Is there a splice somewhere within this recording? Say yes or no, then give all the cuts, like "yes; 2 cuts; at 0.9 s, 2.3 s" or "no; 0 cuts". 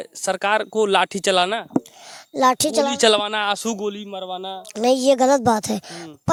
no; 0 cuts